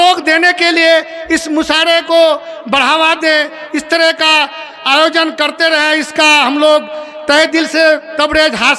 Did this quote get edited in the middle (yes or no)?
no